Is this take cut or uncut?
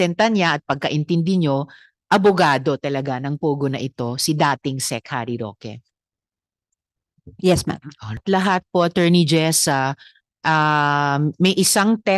cut